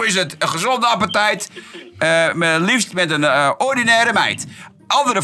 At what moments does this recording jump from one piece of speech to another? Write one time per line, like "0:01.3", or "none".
none

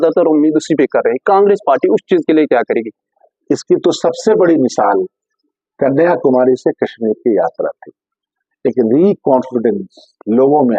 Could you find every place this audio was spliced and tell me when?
none

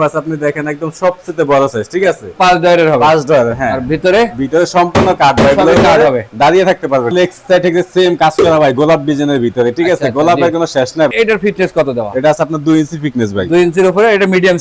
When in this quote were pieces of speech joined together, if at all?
0:07.1
0:11.1

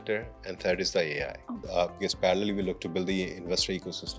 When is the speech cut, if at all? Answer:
0:01.6

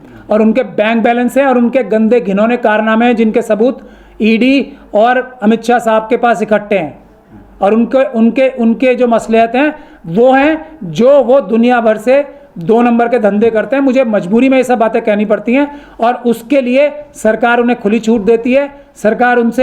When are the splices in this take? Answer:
none

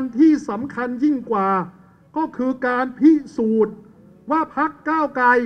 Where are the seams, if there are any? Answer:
none

